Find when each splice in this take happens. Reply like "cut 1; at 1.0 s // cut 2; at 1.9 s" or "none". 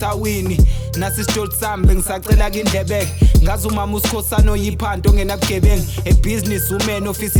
none